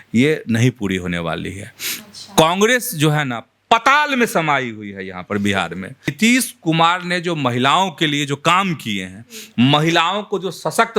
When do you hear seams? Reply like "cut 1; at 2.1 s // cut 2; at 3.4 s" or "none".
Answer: cut 1; at 6.1 s